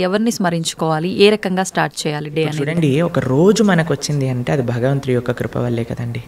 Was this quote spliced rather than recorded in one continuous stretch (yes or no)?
no